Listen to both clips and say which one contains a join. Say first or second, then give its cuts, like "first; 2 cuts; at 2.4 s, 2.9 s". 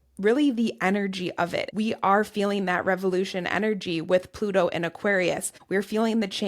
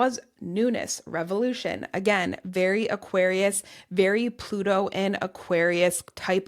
first; 2 cuts; at 1.6 s, 5.5 s